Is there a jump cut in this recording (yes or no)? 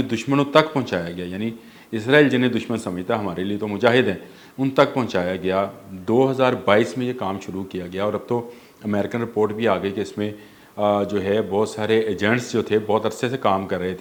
no